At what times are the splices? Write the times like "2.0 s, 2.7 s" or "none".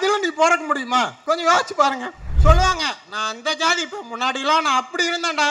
1.2 s, 2.3 s